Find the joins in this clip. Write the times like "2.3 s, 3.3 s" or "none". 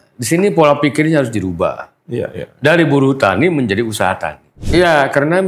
4.6 s